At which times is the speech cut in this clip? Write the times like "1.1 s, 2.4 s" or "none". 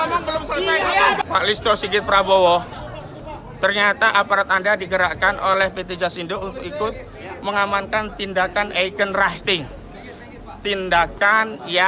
1.2 s